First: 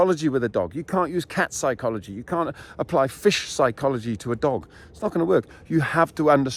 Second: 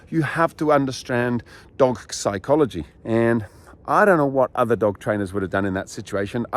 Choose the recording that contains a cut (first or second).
second